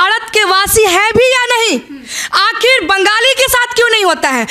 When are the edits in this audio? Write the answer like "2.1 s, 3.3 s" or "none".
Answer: none